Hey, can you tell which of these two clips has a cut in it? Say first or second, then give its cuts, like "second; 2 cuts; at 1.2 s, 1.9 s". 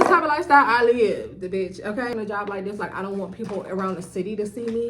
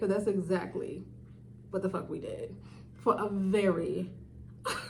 first; 1 cut; at 2.1 s